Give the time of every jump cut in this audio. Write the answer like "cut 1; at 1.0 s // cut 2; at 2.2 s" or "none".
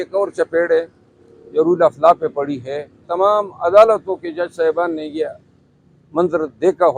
cut 1; at 3.0 s